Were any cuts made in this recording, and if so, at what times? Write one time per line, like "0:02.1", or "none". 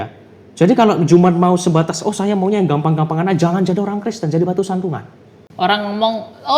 0:05.5